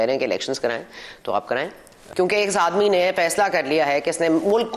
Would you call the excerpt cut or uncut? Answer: cut